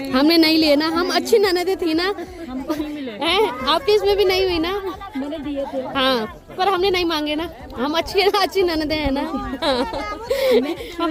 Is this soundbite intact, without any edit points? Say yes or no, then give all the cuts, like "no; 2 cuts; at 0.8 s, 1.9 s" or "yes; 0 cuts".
yes; 0 cuts